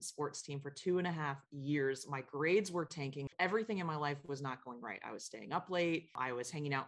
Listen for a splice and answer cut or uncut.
cut